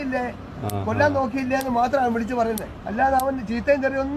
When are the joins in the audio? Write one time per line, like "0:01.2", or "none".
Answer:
0:02.8